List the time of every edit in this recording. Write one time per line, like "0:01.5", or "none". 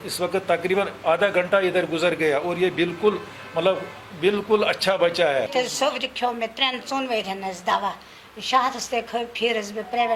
0:05.5